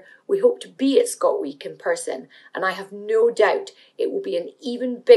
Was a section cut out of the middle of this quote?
no; 0 cuts

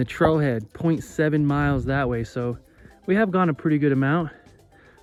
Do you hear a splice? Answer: no; 0 cuts

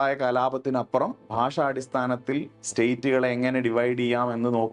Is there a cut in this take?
no; 0 cuts

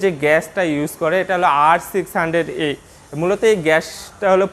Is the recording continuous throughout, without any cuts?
yes; 0 cuts

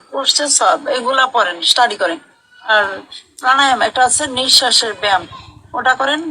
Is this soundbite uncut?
no; 1 cut; at 2.7 s

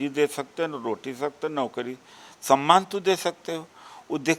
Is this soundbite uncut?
yes; 0 cuts

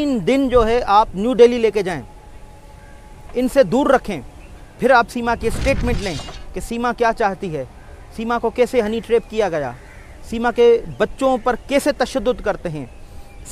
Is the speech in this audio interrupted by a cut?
no; 0 cuts

